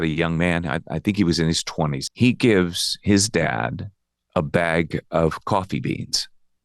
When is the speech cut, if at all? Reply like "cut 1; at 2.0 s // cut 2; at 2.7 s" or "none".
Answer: cut 1; at 2.0 s